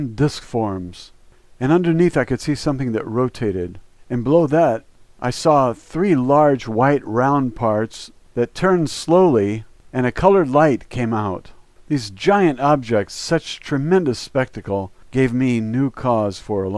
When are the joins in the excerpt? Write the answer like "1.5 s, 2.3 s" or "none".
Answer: 10.4 s